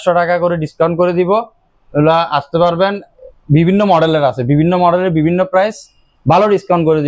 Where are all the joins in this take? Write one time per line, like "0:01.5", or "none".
none

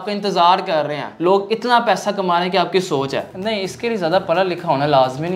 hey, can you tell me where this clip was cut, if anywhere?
0:01.1
0:03.3

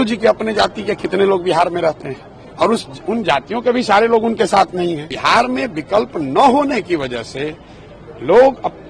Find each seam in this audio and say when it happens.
0:05.1

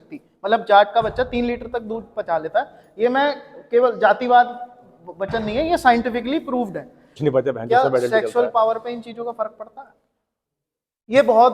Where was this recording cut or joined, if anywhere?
0:07.1

